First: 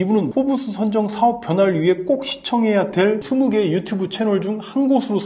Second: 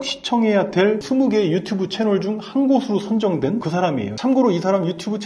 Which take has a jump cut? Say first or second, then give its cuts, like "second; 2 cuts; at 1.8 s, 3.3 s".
second; 1 cut; at 4.1 s